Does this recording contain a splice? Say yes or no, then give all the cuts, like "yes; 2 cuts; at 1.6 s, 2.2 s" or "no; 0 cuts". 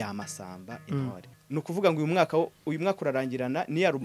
yes; 1 cut; at 1.3 s